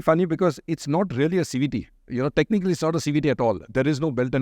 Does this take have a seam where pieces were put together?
no; 0 cuts

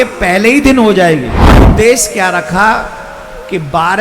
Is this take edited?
yes; 1 cut; at 1.7 s

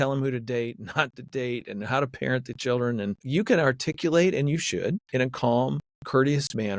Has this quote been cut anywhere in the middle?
yes; 3 cuts; at 3.2 s, 5.0 s, 5.9 s

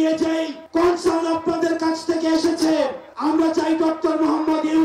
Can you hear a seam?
no; 0 cuts

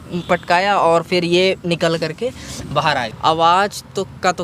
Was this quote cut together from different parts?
yes; 1 cut; at 3.1 s

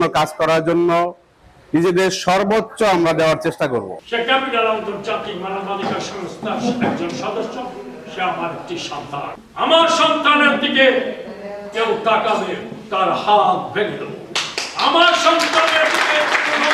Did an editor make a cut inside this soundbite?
yes; 2 cuts; at 4.0 s, 9.4 s

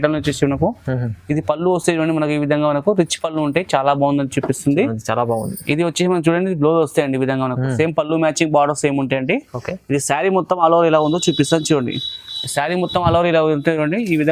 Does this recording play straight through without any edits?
yes; 0 cuts

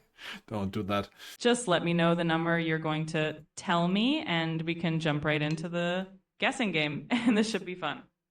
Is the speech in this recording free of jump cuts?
no; 1 cut; at 1.2 s

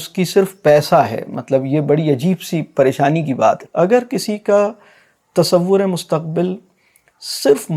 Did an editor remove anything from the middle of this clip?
yes; 1 cut; at 3.6 s

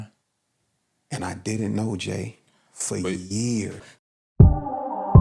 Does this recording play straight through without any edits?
no; 1 cut; at 3.8 s

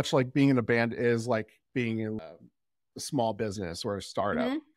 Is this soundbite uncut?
no; 1 cut; at 2.2 s

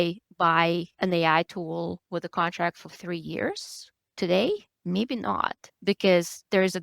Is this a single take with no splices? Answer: no; 2 cuts; at 0.9 s, 2.0 s

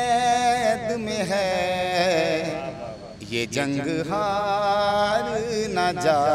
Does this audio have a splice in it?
no; 0 cuts

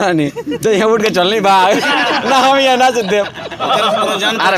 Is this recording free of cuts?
no; 1 cut; at 3.6 s

